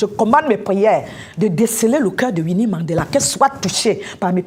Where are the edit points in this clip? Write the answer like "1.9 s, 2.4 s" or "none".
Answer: none